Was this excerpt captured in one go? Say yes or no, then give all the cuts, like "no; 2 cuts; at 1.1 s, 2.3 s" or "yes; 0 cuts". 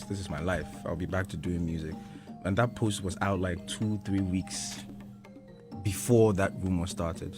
yes; 0 cuts